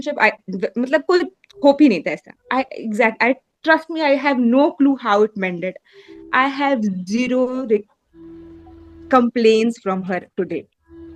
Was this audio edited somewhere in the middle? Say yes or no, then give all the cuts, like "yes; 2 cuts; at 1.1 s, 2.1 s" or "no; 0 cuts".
no; 0 cuts